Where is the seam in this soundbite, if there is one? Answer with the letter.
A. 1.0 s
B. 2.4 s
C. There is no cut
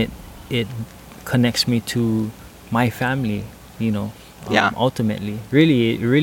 B